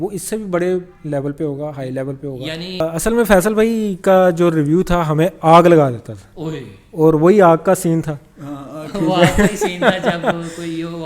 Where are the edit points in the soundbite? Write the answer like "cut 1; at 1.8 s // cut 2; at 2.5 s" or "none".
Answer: cut 1; at 2.8 s